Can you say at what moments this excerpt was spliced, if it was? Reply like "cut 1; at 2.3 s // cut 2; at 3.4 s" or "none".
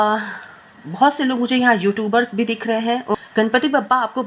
cut 1; at 3.2 s